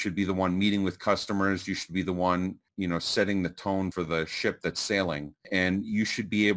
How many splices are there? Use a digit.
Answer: 2